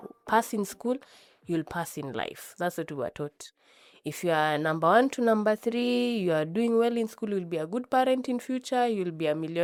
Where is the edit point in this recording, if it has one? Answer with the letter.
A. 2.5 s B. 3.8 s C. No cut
C